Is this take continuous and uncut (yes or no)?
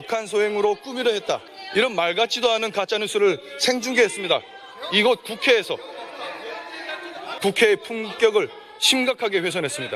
no